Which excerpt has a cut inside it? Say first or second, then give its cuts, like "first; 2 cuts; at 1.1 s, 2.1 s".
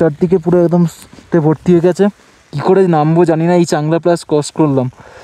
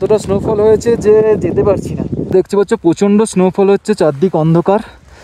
second; 1 cut; at 2.3 s